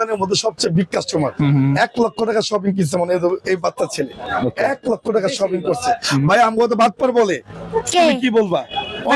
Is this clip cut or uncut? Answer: uncut